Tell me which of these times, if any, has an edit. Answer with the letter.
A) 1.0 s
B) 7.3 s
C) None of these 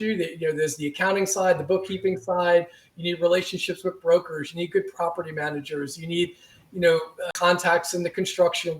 B